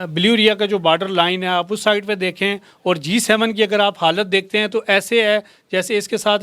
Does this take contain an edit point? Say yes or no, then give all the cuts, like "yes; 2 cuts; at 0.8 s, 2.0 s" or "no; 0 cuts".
no; 0 cuts